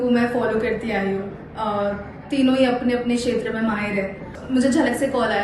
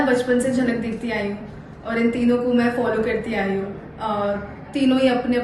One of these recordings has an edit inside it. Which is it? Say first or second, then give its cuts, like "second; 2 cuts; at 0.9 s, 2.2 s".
first; 1 cut; at 4.3 s